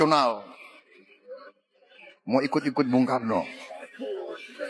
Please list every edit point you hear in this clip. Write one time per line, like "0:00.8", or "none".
none